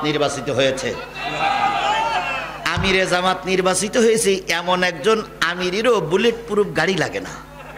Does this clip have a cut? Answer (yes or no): no